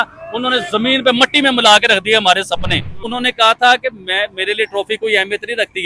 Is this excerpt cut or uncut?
cut